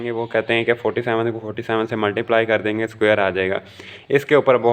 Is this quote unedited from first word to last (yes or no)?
yes